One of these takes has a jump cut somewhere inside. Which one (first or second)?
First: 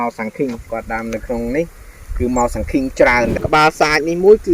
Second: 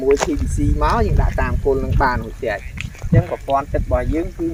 first